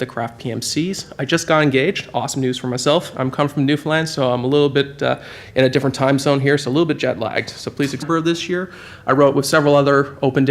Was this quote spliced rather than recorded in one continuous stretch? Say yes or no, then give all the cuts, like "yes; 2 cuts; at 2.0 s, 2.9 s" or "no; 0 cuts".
no; 0 cuts